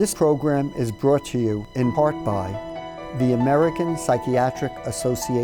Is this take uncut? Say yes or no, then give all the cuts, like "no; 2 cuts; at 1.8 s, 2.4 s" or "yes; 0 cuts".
no; 1 cut; at 2.5 s